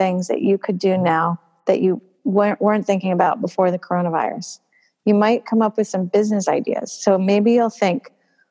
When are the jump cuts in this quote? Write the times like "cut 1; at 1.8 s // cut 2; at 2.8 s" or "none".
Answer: none